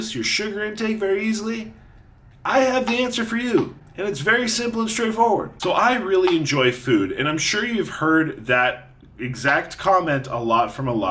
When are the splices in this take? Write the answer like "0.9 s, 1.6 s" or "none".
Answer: 5.6 s